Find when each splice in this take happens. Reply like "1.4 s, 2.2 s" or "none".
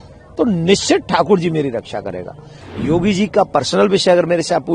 2.5 s